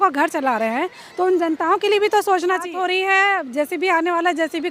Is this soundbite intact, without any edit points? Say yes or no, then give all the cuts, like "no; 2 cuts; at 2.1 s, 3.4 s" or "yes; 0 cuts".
no; 1 cut; at 2.7 s